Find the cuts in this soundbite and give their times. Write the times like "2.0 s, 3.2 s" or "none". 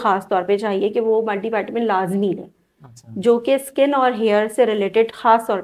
none